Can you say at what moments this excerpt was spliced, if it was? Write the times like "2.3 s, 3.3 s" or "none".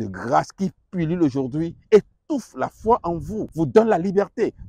3.5 s